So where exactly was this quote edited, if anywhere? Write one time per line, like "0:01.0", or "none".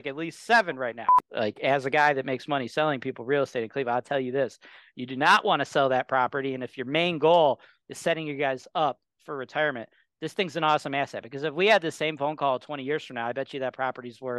0:01.1

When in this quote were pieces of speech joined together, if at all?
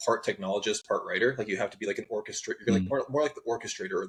none

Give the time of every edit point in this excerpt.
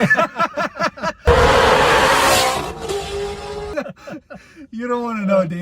0:01.2

